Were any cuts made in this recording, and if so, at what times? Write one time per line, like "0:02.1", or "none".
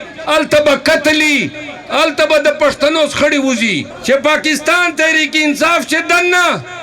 0:03.9